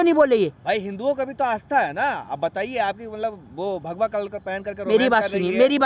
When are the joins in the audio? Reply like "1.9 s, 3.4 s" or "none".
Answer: none